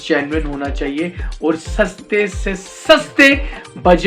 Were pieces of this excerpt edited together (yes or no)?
no